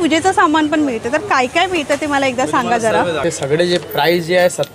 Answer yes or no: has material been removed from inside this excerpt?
yes